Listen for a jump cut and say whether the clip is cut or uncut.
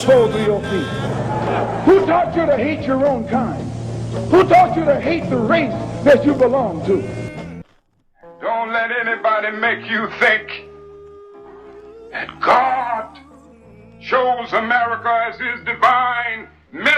cut